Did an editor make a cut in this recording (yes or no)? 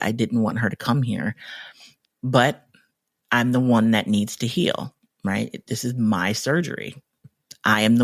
no